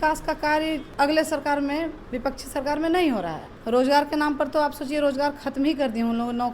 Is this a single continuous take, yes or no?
no